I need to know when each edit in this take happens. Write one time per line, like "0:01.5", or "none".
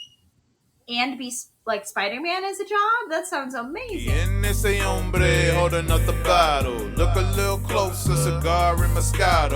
0:04.1